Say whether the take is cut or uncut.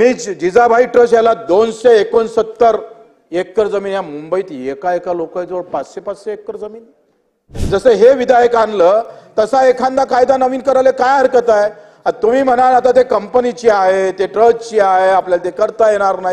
cut